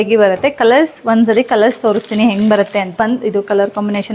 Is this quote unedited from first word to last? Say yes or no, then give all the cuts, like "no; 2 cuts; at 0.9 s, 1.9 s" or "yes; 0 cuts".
no; 1 cut; at 2.9 s